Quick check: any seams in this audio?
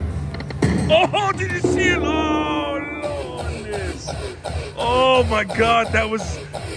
no; 0 cuts

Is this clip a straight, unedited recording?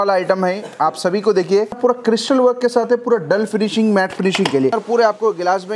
no; 2 cuts; at 1.8 s, 4.7 s

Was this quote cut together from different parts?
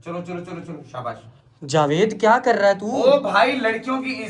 no; 0 cuts

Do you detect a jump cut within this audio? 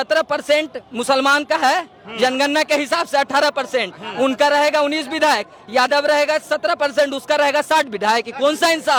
no; 0 cuts

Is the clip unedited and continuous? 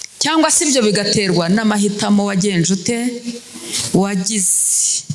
yes; 0 cuts

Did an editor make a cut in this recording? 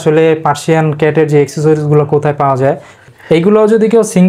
yes; 1 cut; at 3.0 s

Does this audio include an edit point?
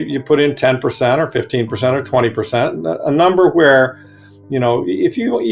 no; 0 cuts

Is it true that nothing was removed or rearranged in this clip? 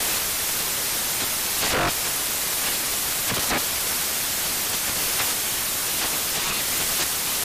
yes; 0 cuts

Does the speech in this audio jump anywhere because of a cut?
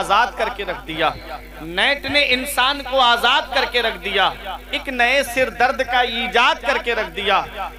no; 0 cuts

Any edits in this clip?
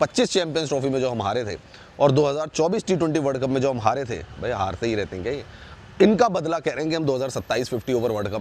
no; 0 cuts

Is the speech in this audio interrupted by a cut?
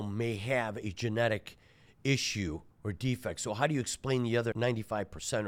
yes; 1 cut; at 4.5 s

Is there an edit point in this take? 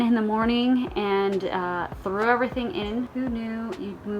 yes; 1 cut; at 3.1 s

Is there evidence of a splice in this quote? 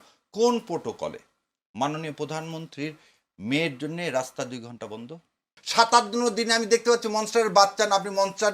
yes; 1 cut; at 5.6 s

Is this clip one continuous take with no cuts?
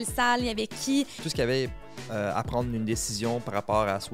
no; 1 cut; at 1.2 s

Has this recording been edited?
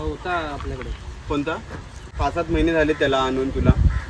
yes; 1 cut; at 2.2 s

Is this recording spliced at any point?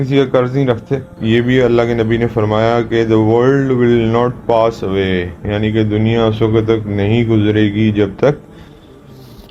yes; 1 cut; at 1.1 s

